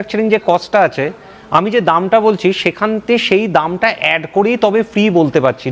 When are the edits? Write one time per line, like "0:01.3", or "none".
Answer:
none